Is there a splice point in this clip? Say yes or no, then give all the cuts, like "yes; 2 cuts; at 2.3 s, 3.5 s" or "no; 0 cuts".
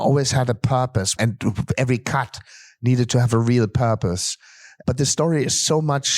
yes; 2 cuts; at 1.2 s, 4.7 s